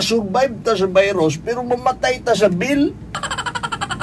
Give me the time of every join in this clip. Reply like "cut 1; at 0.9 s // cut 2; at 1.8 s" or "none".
none